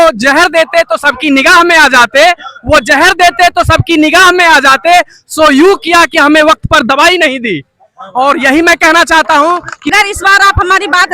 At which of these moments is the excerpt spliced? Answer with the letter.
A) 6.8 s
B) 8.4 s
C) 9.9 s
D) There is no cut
C